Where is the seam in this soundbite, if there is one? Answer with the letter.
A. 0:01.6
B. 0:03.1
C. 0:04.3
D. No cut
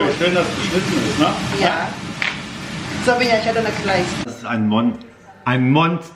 C